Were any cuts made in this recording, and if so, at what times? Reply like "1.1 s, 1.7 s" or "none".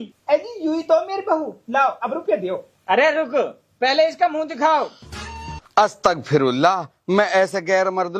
none